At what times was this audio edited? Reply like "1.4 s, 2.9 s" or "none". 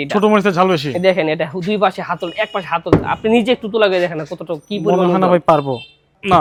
none